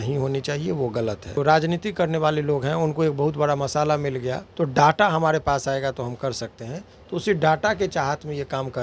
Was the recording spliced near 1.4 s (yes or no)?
yes